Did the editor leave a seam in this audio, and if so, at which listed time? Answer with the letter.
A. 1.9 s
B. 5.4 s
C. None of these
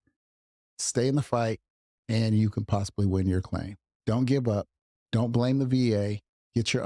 C